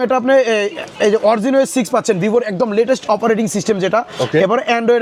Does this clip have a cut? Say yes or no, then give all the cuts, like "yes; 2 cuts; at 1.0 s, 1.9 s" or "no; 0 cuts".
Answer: no; 0 cuts